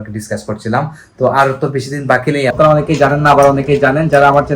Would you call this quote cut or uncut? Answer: cut